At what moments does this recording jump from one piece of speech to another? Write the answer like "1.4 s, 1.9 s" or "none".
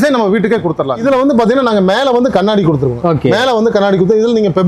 1.0 s